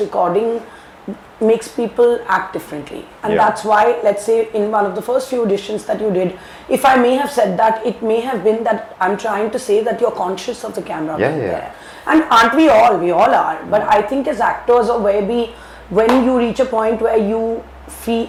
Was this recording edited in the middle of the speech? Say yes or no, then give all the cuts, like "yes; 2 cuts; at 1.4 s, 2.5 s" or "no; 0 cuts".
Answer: no; 0 cuts